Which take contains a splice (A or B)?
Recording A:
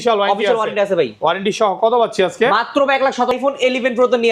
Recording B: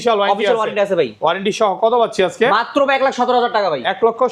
A